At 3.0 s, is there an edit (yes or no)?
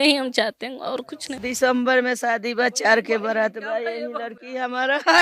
no